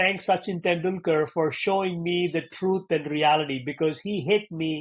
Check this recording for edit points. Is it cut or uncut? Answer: uncut